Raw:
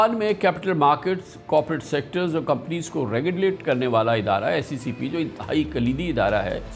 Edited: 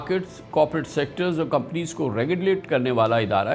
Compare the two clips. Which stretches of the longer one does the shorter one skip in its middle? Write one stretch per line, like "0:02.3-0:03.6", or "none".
none